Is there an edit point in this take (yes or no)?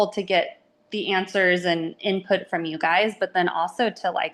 no